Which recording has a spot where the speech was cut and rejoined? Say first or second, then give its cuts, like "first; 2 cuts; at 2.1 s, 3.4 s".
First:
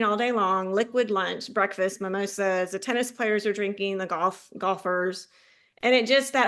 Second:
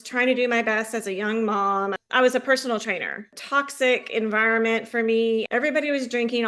second; 3 cuts; at 2.0 s, 3.3 s, 5.5 s